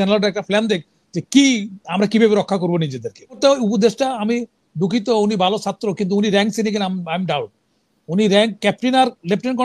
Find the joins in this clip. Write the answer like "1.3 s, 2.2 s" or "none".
3.4 s